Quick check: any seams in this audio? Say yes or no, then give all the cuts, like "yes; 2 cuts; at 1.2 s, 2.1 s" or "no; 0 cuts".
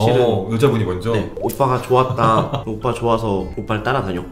yes; 1 cut; at 2.6 s